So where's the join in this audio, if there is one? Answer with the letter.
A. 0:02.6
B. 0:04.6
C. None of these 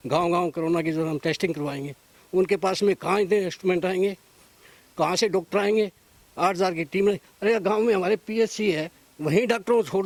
C